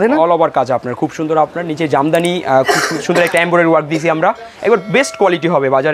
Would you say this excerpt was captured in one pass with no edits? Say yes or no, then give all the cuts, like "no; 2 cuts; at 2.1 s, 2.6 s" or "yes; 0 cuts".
yes; 0 cuts